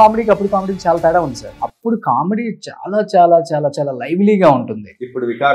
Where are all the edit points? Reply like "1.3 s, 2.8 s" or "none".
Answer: 1.5 s